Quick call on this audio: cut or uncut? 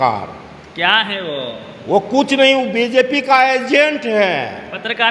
uncut